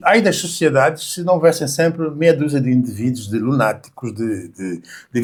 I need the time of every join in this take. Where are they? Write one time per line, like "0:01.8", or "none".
none